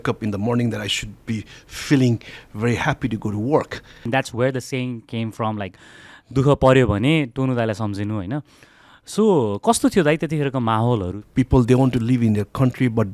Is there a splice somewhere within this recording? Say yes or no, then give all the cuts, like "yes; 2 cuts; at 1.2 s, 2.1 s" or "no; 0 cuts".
yes; 2 cuts; at 4.1 s, 11.2 s